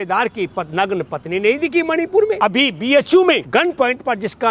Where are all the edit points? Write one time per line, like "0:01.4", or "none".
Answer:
0:02.3
0:03.4